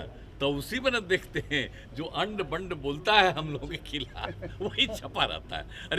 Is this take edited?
no; 0 cuts

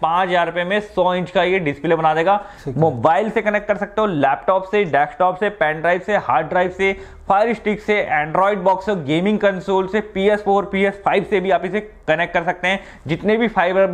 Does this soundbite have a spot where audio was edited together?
no; 0 cuts

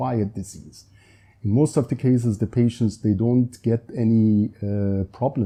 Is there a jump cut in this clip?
no; 0 cuts

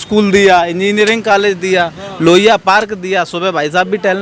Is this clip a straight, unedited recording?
yes; 0 cuts

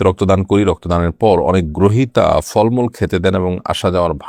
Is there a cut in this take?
no; 0 cuts

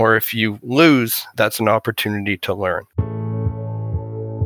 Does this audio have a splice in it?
yes; 2 cuts; at 1.2 s, 2.9 s

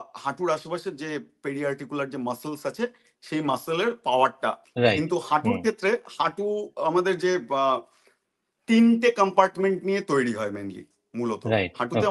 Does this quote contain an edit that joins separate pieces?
yes; 1 cut; at 4.6 s

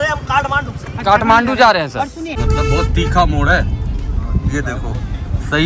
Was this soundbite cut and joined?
yes; 1 cut; at 2.4 s

